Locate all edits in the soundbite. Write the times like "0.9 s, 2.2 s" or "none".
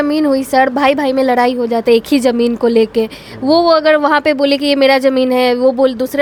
none